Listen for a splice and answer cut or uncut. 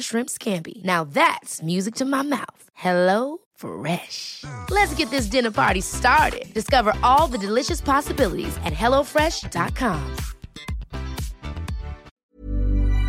cut